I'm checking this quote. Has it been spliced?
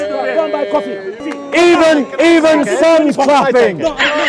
yes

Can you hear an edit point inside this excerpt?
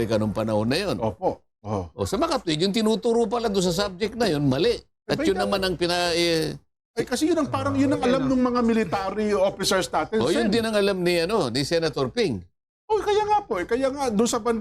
no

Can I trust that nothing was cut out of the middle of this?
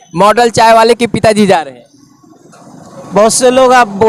yes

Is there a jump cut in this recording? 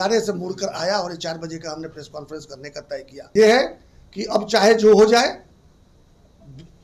yes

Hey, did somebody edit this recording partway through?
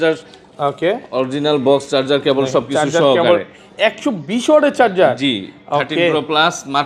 no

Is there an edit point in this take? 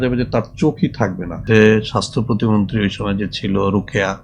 yes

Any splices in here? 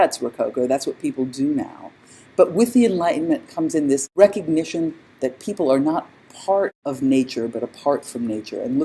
no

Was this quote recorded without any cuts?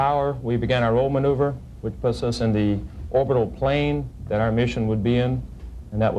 no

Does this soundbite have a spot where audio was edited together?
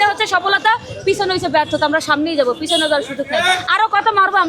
no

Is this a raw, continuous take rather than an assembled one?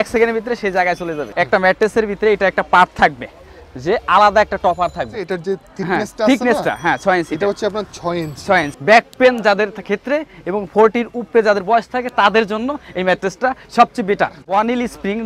no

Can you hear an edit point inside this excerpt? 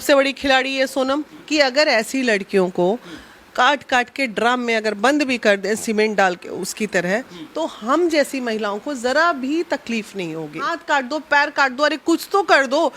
yes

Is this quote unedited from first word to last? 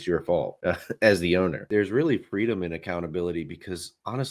no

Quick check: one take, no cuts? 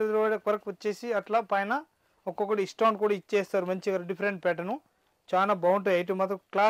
yes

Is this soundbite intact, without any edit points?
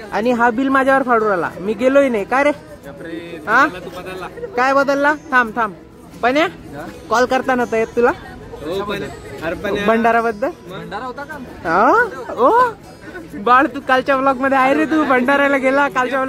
yes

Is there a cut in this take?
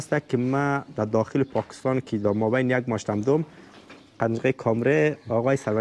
no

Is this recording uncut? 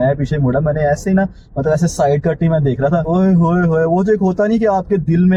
yes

